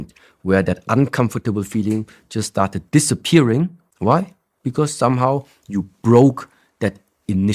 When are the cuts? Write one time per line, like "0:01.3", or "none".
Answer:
0:03.8